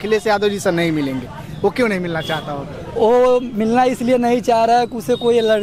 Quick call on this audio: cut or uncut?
uncut